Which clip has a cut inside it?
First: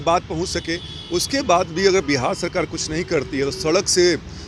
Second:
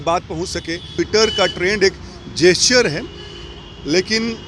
second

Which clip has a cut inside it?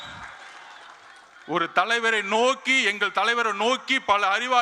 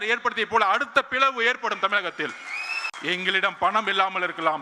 second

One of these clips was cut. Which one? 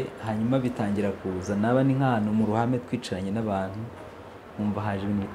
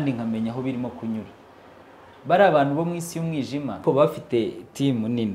second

